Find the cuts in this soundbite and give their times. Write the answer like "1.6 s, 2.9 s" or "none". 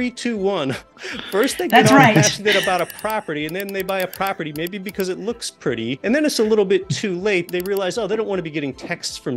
6.0 s, 7.5 s